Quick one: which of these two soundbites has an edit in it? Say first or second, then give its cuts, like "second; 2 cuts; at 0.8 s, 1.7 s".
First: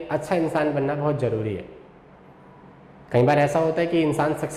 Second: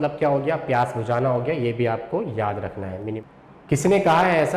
second; 1 cut; at 3.2 s